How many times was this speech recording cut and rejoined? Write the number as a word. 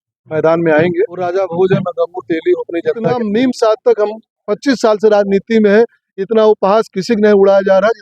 two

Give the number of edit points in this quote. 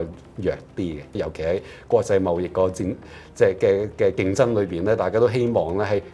one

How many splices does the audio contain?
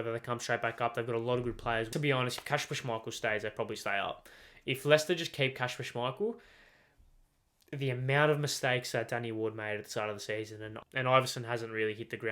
two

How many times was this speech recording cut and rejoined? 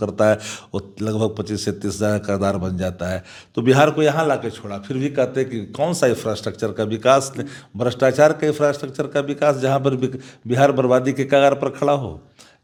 zero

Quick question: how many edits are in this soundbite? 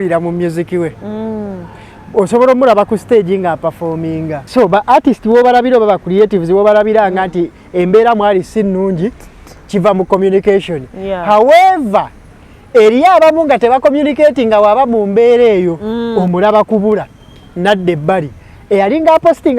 one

